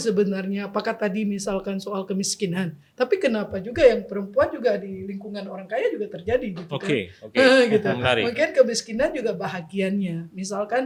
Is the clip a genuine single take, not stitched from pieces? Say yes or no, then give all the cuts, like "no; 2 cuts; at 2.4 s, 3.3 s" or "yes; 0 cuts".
yes; 0 cuts